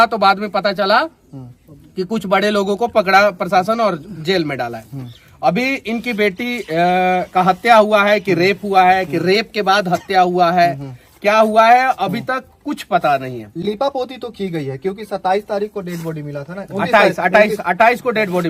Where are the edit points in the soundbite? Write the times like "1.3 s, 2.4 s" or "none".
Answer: none